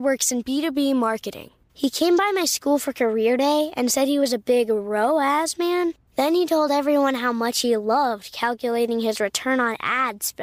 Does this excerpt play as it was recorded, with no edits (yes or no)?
yes